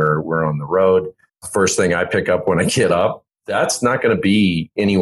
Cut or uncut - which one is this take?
uncut